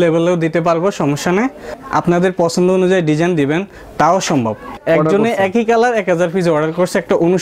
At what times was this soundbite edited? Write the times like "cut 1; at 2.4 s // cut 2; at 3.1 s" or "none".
cut 1; at 1.8 s // cut 2; at 4.8 s